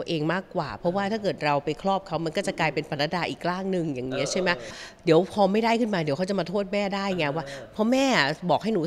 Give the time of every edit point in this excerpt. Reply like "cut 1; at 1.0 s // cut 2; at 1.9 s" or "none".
cut 1; at 4.9 s